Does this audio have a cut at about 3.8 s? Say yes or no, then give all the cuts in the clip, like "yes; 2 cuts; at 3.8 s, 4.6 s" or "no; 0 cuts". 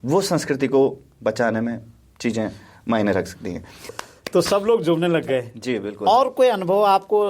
yes; 1 cut; at 3.8 s